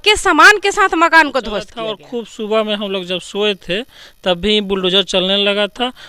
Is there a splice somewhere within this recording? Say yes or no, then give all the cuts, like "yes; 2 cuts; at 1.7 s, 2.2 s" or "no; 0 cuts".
yes; 1 cut; at 2.0 s